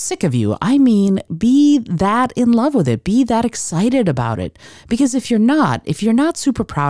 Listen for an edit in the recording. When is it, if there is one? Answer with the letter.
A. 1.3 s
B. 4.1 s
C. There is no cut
A